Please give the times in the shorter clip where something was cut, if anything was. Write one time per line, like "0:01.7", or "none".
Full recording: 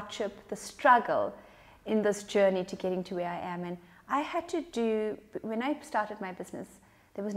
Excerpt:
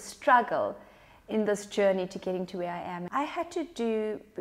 0:03.0